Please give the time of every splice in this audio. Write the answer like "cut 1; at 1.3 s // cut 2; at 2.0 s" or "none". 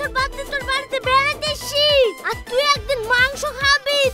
none

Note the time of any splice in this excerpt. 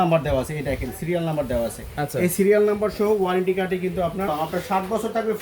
cut 1; at 4.3 s

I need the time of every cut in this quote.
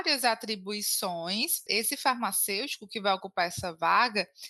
cut 1; at 1.6 s

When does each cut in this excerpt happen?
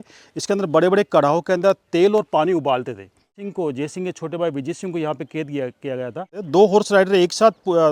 cut 1; at 3.4 s // cut 2; at 6.4 s

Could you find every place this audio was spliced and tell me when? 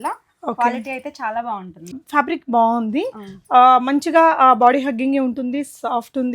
cut 1; at 2.0 s

